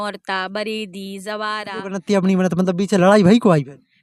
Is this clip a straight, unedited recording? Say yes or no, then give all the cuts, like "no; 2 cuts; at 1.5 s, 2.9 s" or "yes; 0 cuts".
no; 1 cut; at 1.8 s